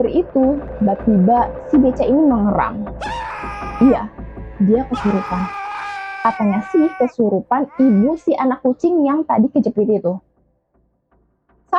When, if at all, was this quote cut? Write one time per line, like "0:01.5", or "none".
none